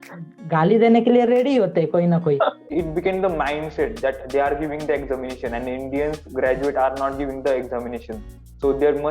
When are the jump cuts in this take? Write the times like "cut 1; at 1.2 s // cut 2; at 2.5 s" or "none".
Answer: cut 1; at 2.6 s